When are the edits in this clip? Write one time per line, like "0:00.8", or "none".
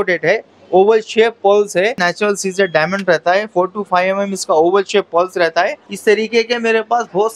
0:02.0
0:05.8